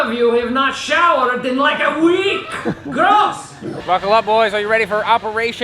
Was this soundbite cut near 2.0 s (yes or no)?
no